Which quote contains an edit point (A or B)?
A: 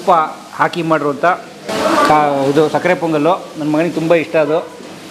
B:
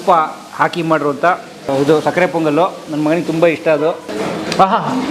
B